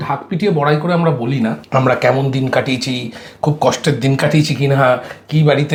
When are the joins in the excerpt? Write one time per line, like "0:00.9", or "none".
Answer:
none